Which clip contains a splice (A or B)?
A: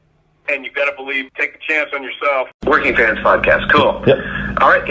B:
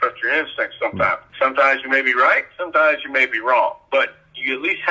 A